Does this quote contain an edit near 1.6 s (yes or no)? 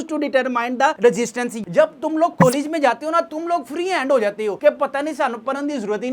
yes